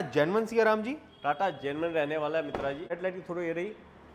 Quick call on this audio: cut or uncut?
cut